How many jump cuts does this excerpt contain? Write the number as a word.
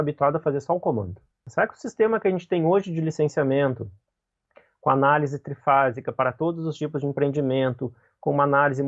one